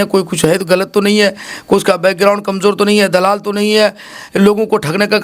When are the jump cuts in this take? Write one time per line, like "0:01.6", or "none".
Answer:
none

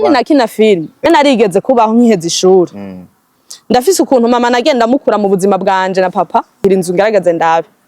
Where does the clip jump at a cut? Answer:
0:01.1
0:06.6

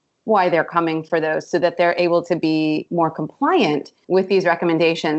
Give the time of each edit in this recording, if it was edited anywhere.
0:02.8
0:03.9

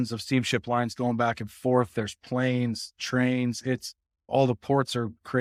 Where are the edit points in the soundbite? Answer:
none

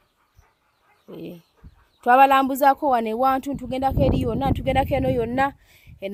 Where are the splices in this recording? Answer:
none

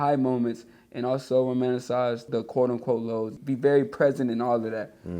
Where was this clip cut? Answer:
0:02.2
0:03.4

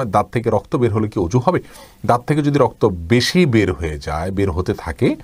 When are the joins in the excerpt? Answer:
none

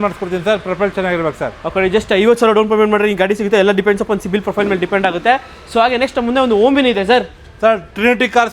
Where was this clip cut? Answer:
none

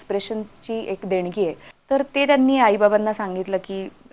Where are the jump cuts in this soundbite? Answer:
0:01.7

